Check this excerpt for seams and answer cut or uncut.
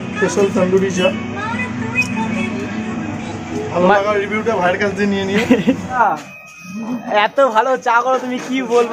cut